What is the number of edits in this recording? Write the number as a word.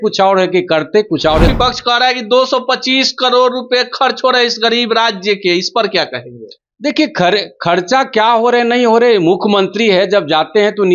one